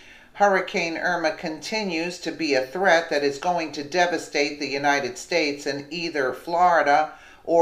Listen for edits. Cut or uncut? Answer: cut